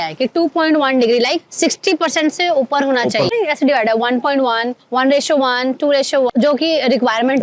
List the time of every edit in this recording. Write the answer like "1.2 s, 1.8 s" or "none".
3.3 s, 6.3 s